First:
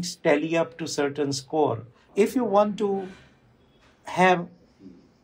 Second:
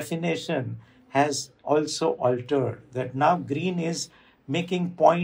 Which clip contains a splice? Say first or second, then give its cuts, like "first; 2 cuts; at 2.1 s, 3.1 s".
first; 1 cut; at 2.0 s